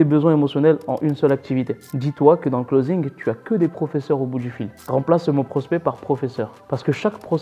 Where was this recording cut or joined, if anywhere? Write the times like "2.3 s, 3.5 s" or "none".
1.9 s, 4.8 s